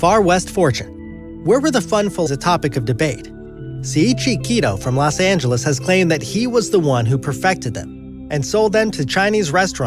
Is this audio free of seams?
yes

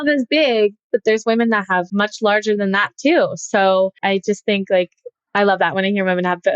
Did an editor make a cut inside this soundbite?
yes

